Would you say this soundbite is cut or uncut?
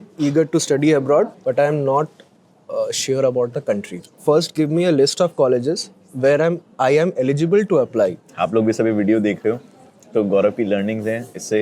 cut